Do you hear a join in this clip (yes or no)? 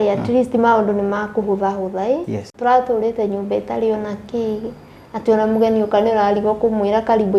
yes